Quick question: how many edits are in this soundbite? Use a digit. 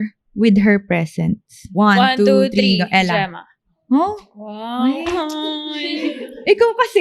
1